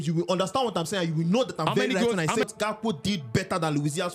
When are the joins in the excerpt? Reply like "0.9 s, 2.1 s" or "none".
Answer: 2.5 s